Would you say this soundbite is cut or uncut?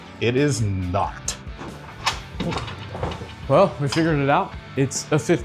cut